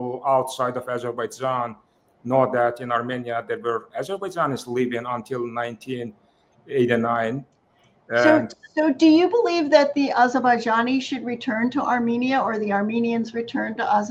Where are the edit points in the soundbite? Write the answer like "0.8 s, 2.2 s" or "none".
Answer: none